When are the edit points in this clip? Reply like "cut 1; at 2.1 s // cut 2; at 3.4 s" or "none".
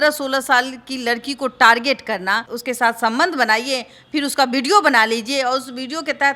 cut 1; at 2.5 s